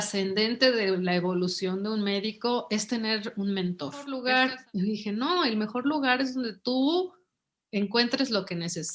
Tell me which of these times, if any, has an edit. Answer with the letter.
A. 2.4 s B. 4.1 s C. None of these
B